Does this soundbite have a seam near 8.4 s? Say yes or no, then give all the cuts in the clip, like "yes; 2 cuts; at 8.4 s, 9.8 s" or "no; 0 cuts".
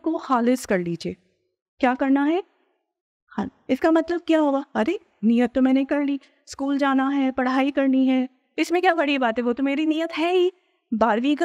no; 0 cuts